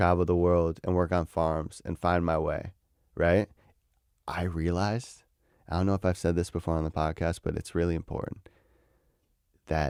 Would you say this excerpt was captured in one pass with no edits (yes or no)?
yes